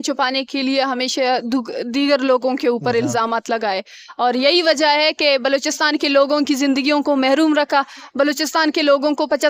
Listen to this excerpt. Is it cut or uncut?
uncut